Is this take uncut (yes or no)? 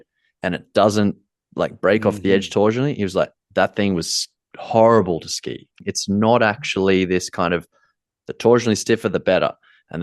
no